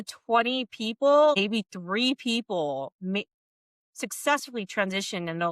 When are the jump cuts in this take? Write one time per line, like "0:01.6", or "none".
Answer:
0:01.4